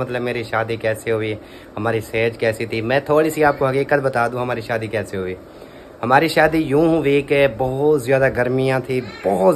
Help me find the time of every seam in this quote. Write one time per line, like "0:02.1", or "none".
none